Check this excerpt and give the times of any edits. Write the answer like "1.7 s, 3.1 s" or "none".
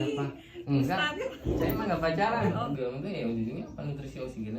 2.8 s